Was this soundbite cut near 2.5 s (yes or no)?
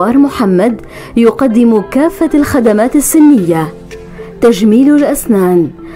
yes